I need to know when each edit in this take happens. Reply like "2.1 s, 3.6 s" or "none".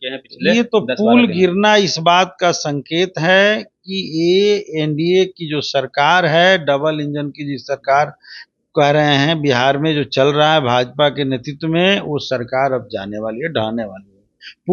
none